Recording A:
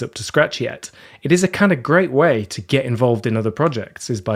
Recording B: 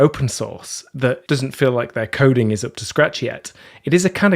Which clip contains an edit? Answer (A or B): B